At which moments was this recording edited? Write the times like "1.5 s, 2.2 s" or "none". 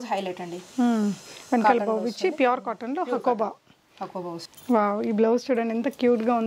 4.3 s